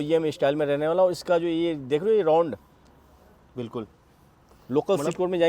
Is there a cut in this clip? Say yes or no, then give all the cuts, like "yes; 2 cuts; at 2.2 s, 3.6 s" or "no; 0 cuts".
no; 0 cuts